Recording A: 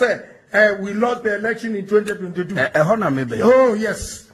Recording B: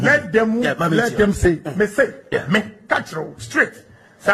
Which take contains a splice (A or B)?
A